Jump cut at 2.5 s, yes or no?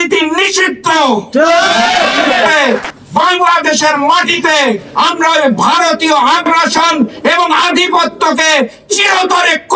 yes